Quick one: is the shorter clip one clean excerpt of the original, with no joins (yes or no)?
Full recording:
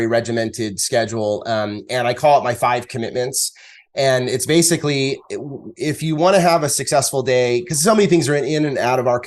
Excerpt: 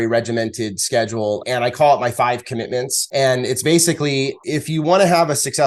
no